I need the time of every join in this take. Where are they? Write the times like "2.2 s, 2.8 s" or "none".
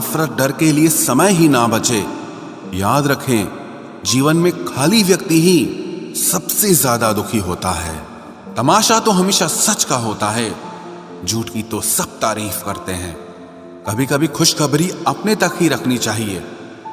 none

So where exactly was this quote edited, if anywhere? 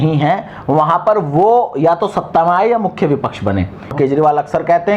3.9 s

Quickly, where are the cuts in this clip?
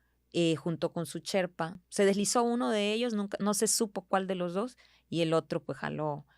1.8 s

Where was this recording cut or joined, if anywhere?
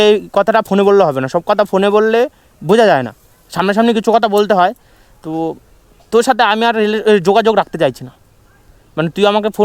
none

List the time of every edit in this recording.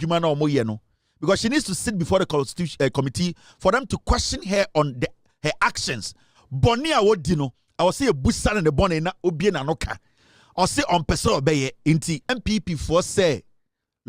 12.3 s

